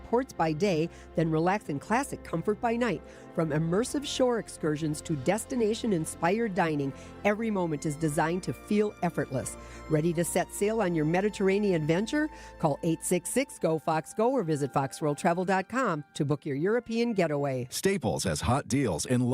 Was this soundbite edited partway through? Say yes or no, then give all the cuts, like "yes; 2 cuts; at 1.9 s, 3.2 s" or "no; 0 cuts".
yes; 1 cut; at 17.7 s